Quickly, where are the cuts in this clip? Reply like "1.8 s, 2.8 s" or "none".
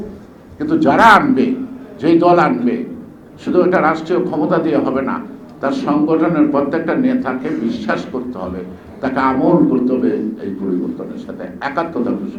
none